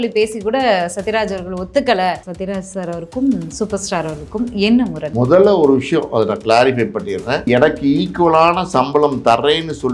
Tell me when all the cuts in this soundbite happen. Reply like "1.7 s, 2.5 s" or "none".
2.3 s, 5.0 s, 7.4 s